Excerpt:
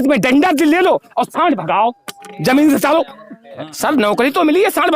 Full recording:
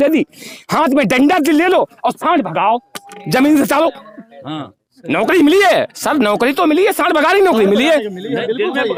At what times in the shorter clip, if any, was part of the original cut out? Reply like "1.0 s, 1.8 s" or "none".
3.7 s